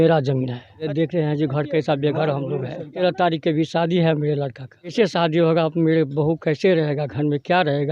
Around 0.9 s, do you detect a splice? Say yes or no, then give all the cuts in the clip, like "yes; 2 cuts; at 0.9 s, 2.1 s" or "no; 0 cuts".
yes; 3 cuts; at 0.9 s, 2.9 s, 4.9 s